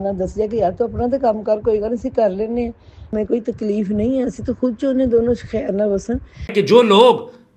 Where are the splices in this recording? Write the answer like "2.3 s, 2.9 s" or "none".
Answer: 6.5 s